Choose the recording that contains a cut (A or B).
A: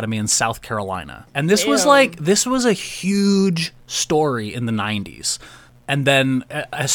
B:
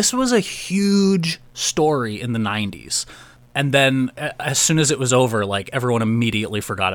A